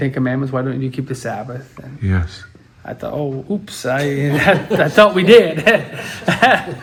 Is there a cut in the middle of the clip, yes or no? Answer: no